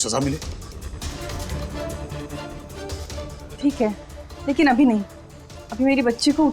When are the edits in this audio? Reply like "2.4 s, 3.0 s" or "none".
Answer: 1.2 s